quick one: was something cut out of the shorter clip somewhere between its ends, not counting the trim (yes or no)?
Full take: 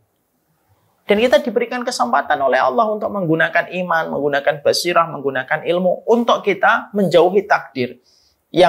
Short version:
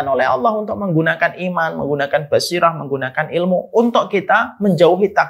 no